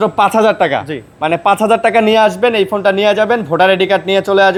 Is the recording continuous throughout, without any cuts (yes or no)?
yes